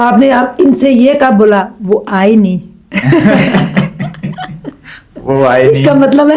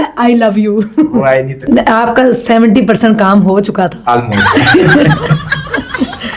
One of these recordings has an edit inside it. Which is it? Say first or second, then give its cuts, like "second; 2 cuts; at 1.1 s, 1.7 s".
second; 1 cut; at 1.5 s